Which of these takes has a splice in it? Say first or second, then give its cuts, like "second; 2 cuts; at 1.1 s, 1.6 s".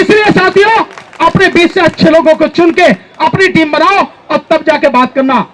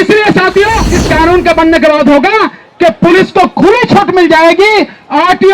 second; 1 cut; at 0.9 s